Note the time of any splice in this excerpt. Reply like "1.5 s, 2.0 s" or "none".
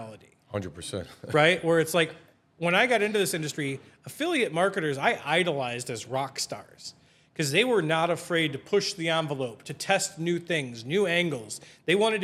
none

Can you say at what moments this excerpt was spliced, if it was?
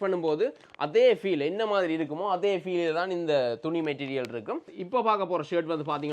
4.6 s

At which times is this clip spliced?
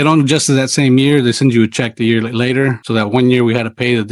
2.8 s

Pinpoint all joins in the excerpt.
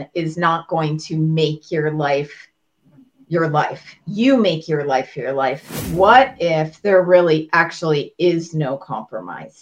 5.8 s

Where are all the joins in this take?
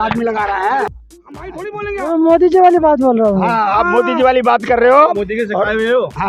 1.1 s

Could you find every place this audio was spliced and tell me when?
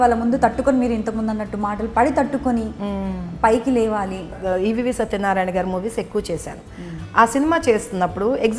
4.4 s

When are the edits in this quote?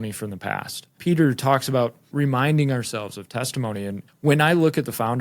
0.9 s, 2.1 s, 4.0 s

